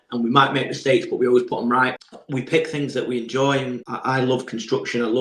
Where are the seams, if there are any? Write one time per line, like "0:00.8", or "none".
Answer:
0:02.0
0:03.9